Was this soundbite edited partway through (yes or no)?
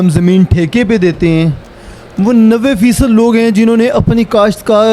no